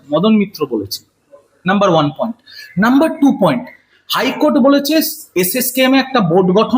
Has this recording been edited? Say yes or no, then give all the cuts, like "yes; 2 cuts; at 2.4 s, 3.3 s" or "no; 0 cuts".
no; 0 cuts